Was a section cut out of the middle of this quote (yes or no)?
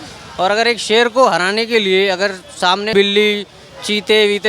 yes